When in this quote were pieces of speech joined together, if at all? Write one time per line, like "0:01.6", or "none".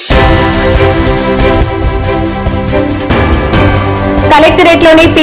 0:04.3